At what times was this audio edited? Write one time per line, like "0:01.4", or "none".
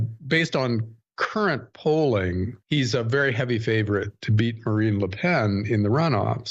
0:02.3